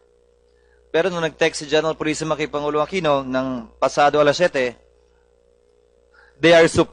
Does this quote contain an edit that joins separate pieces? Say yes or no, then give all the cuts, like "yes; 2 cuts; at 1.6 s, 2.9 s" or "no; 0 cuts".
no; 0 cuts